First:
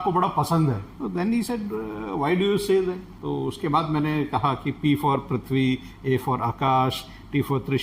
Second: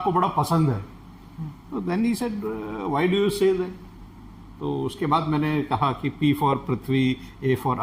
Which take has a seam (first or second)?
first